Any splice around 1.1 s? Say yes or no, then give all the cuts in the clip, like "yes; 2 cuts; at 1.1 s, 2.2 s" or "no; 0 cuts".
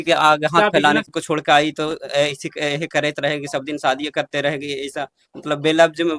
yes; 1 cut; at 1.1 s